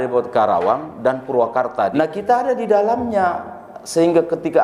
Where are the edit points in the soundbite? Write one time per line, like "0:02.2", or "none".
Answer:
0:01.9